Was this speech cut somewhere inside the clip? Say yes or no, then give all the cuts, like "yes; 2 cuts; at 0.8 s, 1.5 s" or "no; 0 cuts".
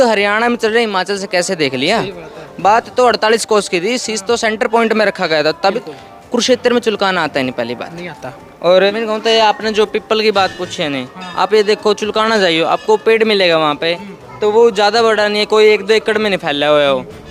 yes; 2 cuts; at 5.8 s, 8.9 s